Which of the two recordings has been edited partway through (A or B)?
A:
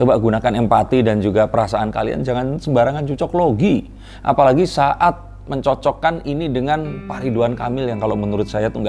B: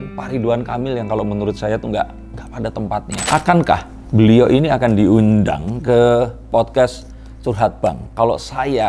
B